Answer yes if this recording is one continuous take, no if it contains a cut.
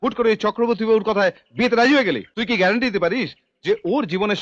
no